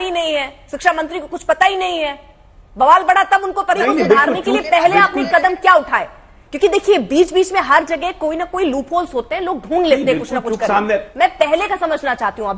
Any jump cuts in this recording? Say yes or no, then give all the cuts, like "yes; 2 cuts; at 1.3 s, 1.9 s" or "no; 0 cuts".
yes; 1 cut; at 3.8 s